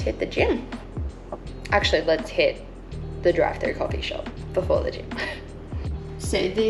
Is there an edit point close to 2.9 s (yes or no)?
no